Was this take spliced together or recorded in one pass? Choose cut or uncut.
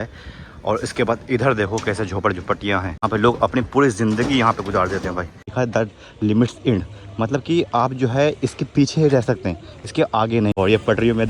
cut